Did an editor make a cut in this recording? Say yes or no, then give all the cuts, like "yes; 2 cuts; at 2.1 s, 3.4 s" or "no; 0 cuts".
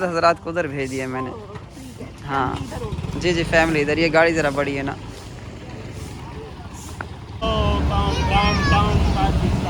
no; 0 cuts